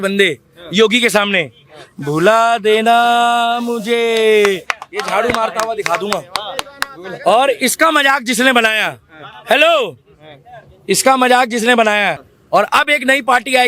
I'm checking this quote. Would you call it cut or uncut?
cut